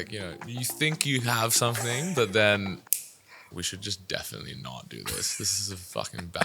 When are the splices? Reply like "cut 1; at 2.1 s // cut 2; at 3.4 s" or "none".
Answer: cut 1; at 3.5 s